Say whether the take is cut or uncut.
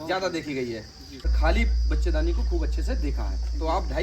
cut